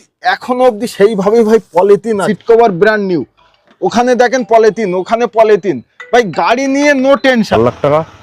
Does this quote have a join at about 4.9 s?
no; 2 cuts; at 2.3 s, 7.5 s

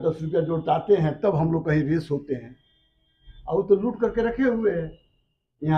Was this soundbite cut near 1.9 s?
no; 0 cuts

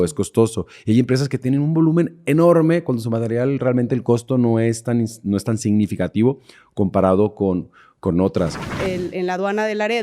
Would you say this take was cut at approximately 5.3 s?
no; 1 cut; at 8.7 s

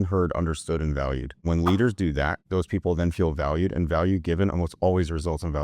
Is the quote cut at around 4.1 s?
no; 2 cuts; at 1.4 s, 2.4 s

